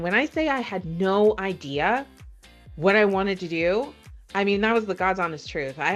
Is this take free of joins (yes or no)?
yes